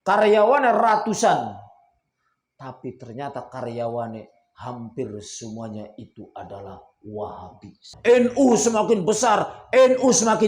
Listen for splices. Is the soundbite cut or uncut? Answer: cut